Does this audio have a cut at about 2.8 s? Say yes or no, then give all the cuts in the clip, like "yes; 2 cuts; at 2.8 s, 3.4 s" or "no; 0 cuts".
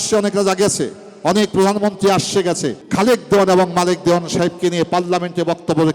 yes; 1 cut; at 2.8 s